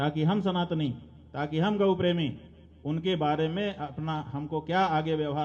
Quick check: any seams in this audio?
no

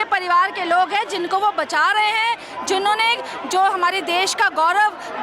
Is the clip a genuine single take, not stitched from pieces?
yes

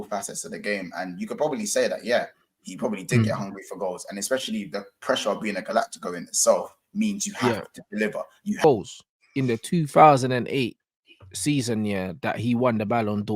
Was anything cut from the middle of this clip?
yes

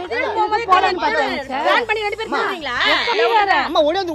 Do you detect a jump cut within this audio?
yes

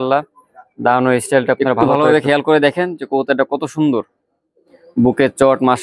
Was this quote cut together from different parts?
yes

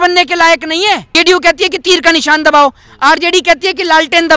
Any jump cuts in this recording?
yes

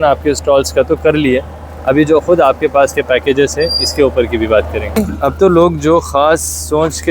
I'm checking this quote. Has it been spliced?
yes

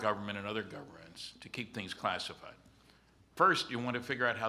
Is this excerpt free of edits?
no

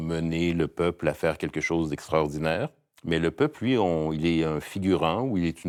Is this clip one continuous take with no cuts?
yes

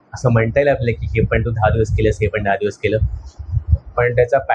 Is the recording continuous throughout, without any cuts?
yes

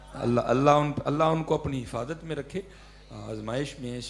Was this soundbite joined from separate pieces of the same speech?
no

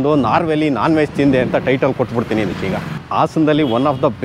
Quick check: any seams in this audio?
no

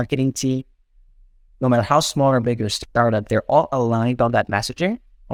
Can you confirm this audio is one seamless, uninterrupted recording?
yes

